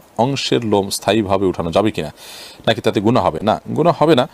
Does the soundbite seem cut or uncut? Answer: uncut